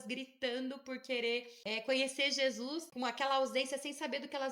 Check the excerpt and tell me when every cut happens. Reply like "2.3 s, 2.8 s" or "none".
1.6 s, 2.9 s